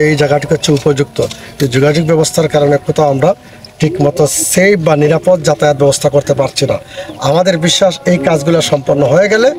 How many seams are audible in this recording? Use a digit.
0